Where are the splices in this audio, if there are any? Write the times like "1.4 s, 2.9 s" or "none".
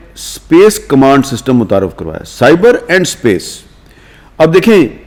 none